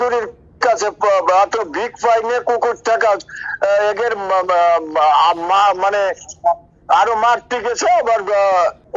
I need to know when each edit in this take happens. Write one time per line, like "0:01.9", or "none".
none